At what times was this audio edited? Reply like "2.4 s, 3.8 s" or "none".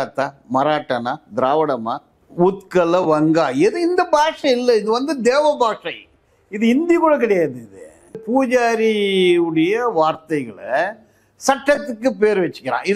8.2 s